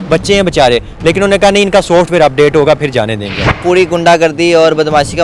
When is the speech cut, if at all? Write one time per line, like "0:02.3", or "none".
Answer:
0:03.6